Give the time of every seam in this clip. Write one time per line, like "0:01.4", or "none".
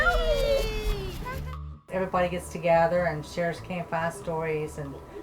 0:01.4